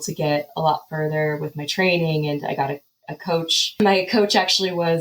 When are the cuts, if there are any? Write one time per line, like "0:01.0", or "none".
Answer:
0:03.8